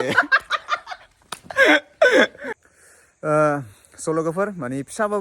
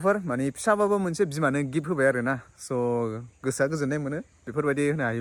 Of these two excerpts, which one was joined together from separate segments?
first; 1 cut; at 2.5 s

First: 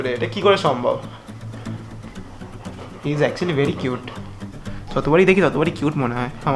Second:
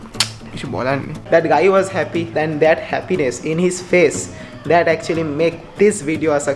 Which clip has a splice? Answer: second; 2 cuts; at 1.2 s, 2.3 s

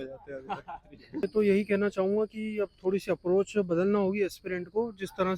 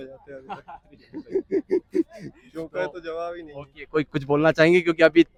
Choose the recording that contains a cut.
first; 1 cut; at 1.2 s

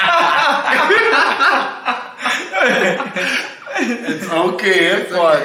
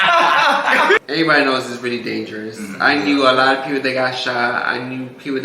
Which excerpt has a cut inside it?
second; 1 cut; at 1.0 s

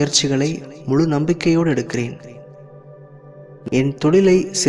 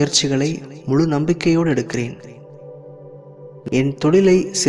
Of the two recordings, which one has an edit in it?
second; 2 cuts; at 2.2 s, 3.6 s

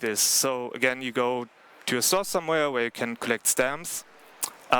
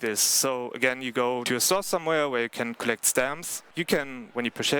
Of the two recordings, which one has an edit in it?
second; 2 cuts; at 1.4 s, 3.7 s

